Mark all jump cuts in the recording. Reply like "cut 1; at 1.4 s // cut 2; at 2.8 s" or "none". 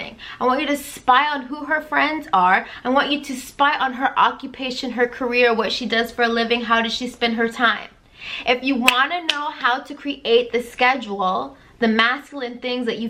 none